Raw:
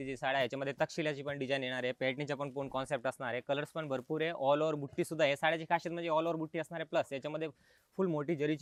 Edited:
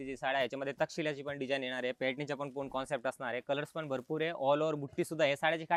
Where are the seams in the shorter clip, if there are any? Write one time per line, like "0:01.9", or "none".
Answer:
none